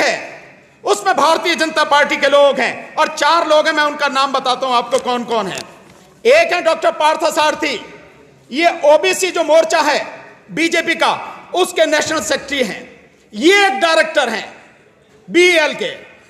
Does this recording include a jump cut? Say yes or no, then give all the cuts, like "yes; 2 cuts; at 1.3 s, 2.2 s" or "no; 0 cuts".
no; 0 cuts